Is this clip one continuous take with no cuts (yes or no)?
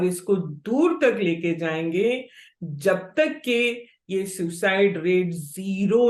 yes